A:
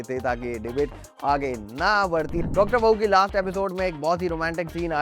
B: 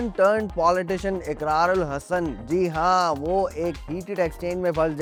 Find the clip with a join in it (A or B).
A